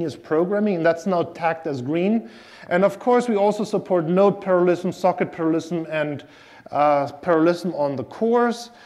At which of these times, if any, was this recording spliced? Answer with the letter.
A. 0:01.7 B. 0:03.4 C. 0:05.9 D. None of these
C